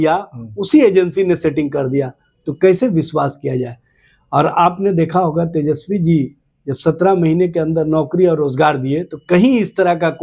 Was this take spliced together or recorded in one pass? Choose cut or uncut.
uncut